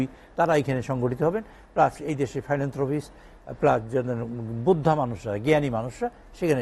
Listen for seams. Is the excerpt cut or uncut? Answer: uncut